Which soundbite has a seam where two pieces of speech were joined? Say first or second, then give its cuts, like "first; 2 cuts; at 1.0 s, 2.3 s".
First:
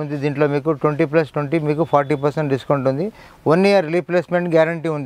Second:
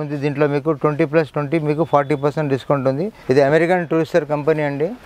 second; 1 cut; at 3.2 s